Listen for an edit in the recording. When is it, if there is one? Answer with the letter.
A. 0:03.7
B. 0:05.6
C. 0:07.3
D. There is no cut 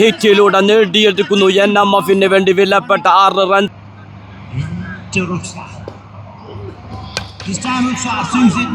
A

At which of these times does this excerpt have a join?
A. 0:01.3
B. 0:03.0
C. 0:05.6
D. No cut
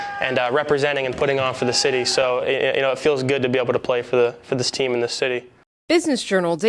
C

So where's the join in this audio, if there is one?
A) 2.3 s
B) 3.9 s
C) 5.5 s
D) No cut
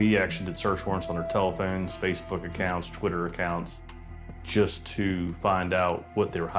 D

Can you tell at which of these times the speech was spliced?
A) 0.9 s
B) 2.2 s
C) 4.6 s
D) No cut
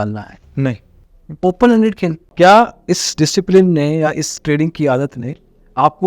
B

